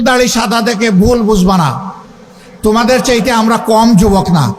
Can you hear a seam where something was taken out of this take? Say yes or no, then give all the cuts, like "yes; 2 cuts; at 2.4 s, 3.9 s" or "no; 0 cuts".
no; 0 cuts